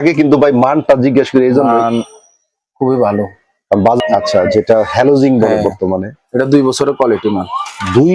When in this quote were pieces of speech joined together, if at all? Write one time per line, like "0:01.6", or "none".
0:04.0